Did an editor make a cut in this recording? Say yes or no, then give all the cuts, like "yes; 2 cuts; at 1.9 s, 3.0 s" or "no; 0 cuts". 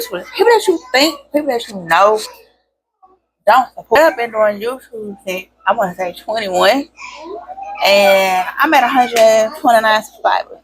yes; 1 cut; at 4.0 s